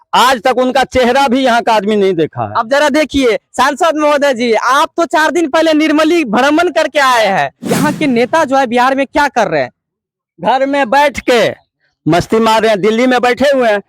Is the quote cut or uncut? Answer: cut